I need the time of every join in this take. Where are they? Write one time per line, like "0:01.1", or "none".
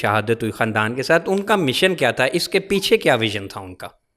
none